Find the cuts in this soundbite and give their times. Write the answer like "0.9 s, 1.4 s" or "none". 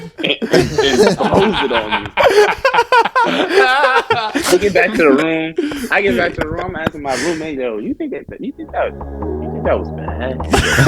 none